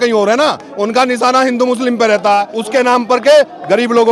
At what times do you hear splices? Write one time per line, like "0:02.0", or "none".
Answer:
none

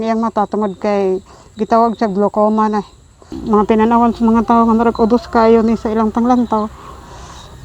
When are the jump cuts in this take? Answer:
0:03.4

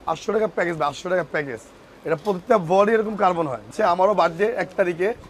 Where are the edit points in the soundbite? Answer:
0:03.7

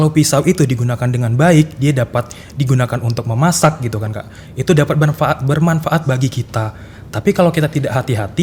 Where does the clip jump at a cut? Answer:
none

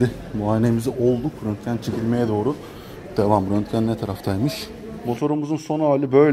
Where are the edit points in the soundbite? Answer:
0:05.0

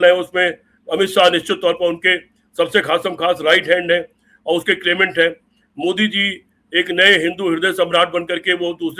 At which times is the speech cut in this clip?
none

